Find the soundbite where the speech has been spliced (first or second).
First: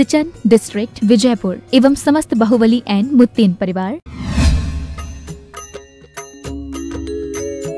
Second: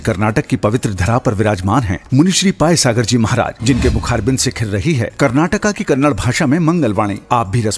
first